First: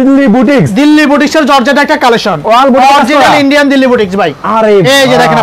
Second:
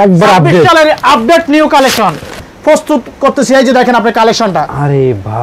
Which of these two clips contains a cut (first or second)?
second